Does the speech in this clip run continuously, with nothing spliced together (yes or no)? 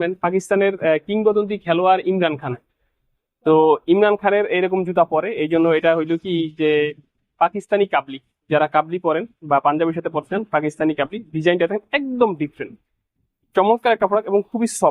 yes